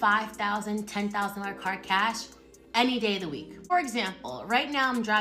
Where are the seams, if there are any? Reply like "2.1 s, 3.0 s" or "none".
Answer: 3.7 s